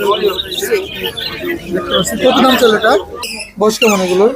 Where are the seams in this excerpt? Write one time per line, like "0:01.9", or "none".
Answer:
0:03.3